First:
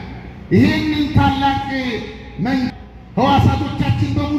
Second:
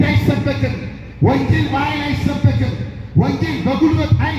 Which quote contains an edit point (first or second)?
first